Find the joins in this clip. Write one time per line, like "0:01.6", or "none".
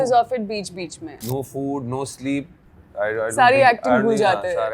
0:01.2